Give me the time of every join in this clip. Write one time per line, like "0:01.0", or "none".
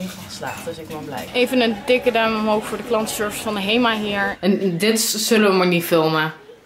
0:01.3
0:04.3